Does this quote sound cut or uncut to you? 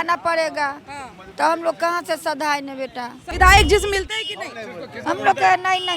cut